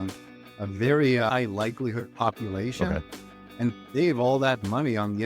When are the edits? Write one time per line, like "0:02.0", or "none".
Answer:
none